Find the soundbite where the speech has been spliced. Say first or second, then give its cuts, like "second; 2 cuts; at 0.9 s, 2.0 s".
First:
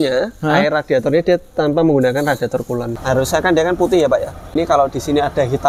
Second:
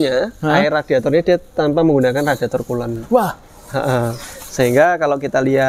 first; 2 cuts; at 2.9 s, 4.5 s